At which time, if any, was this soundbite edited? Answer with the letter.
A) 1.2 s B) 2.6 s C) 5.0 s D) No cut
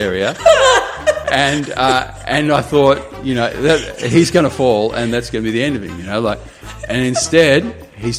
A